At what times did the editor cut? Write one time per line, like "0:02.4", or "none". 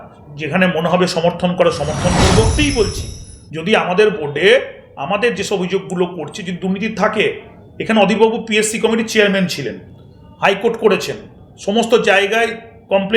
0:02.5